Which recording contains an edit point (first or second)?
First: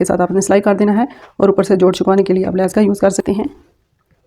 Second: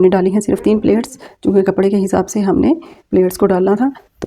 first